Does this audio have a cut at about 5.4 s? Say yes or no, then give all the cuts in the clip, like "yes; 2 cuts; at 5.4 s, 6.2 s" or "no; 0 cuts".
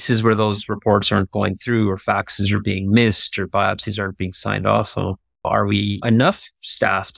yes; 1 cut; at 5.4 s